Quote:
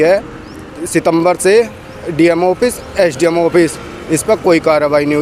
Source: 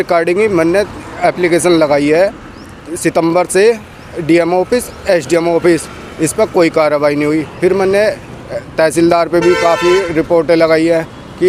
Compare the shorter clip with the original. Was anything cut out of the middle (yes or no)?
no